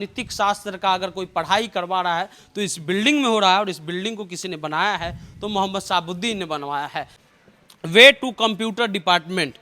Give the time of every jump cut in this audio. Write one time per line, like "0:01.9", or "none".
0:07.1